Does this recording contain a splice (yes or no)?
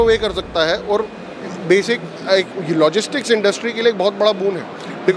no